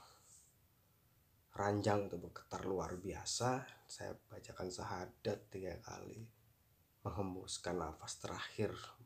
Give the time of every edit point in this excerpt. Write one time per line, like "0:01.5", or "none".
none